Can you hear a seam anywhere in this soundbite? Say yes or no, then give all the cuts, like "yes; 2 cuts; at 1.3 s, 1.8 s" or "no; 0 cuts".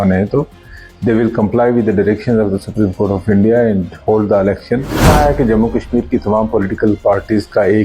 yes; 1 cut; at 5.0 s